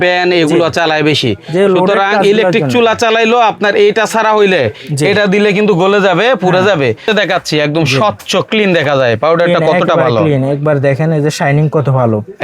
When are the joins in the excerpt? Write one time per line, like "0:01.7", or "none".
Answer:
0:07.1